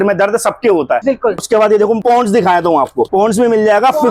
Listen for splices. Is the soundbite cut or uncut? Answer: uncut